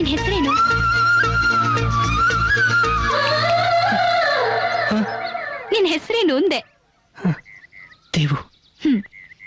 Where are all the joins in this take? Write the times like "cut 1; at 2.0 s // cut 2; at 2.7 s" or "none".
none